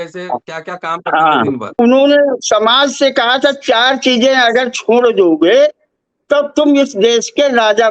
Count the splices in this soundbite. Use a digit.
1